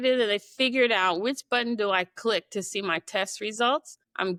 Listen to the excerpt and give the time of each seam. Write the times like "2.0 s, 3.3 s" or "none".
none